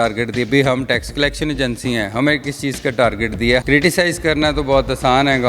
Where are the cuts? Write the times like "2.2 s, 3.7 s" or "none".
3.6 s

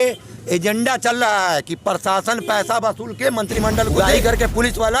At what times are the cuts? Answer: 3.9 s

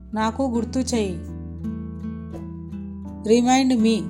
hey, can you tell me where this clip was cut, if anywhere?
1.3 s, 3.2 s

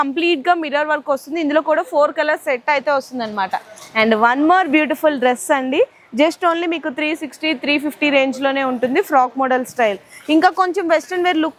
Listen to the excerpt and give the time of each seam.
none

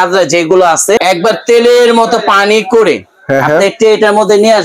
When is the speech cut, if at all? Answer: 1.0 s

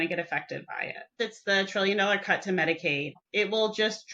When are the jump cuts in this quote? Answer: 1.1 s, 3.1 s

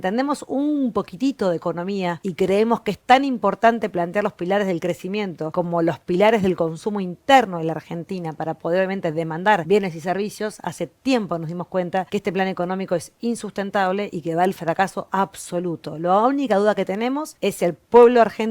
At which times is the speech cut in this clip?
2.2 s, 5.4 s, 9.6 s, 12.1 s, 17.3 s

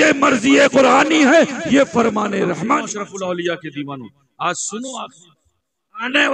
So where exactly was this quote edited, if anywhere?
2.9 s

